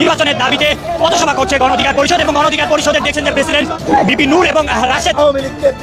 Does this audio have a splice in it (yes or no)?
no